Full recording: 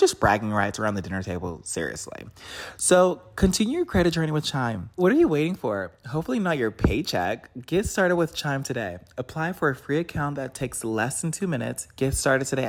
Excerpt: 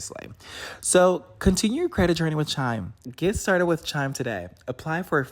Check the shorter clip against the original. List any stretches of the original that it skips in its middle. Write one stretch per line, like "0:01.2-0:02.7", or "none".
0:04.9-0:07.4